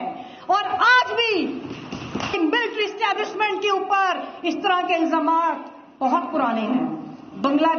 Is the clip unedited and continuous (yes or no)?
no